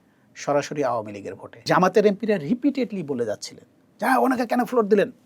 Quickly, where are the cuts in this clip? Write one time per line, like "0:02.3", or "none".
0:01.6